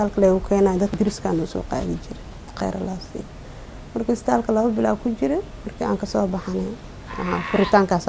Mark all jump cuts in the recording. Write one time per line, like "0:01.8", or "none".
0:01.0